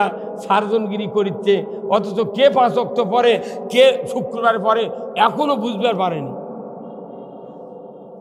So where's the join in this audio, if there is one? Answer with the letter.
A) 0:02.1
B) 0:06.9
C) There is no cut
C